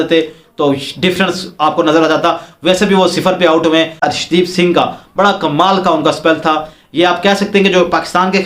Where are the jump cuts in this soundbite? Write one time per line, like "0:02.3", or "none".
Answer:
0:04.0